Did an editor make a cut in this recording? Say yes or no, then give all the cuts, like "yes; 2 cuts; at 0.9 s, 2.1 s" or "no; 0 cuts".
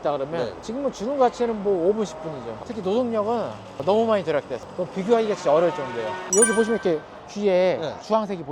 yes; 2 cuts; at 2.6 s, 6.2 s